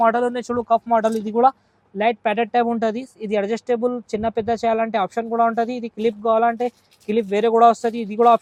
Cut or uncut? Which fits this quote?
uncut